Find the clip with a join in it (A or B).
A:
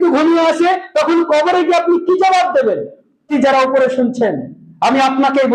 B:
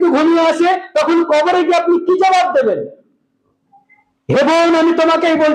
A